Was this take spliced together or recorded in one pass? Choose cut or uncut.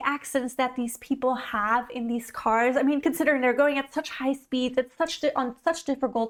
uncut